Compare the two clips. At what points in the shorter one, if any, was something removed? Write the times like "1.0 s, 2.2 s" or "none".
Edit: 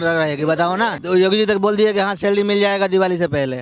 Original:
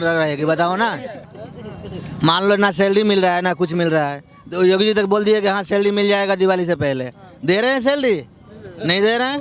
1.0 s